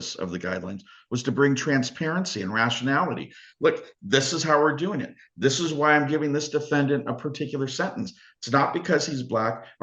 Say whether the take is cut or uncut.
uncut